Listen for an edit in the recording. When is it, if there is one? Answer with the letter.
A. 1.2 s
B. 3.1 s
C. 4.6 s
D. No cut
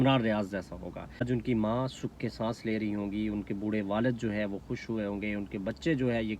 A